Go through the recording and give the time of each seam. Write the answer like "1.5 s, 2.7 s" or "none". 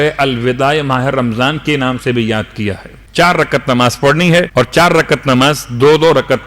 2.9 s, 4.5 s